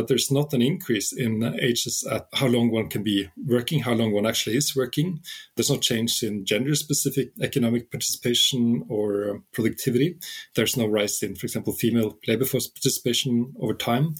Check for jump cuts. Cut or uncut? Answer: uncut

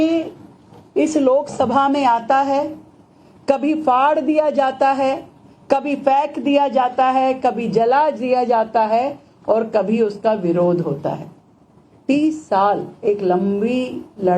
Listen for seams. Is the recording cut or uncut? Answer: cut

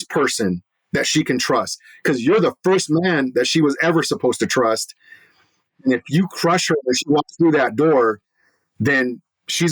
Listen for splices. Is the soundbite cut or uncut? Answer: uncut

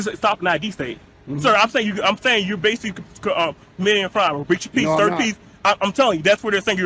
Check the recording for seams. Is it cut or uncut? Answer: uncut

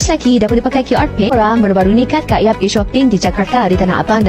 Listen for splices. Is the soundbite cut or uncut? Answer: cut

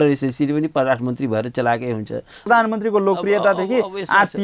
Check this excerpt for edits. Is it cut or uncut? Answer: cut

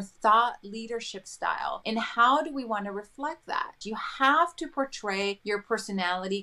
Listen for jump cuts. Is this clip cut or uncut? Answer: cut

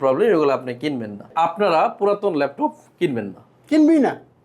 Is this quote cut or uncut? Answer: cut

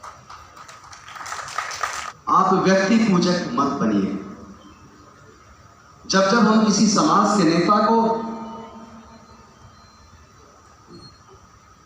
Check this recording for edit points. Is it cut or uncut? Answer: cut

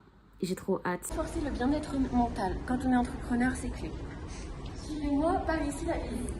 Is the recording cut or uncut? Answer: cut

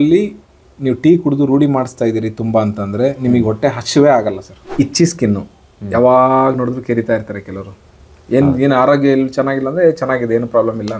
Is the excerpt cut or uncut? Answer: cut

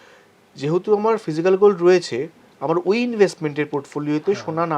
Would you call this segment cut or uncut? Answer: uncut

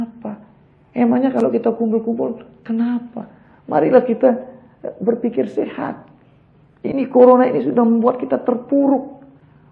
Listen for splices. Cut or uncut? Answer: uncut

